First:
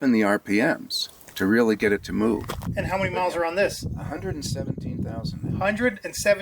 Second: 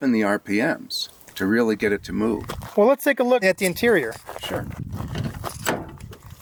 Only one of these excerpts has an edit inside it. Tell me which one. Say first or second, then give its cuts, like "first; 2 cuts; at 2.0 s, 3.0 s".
first; 2 cuts; at 2.6 s, 3.9 s